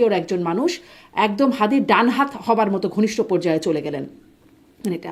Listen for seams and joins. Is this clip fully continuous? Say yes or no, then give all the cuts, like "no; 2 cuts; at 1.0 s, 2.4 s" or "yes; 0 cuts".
yes; 0 cuts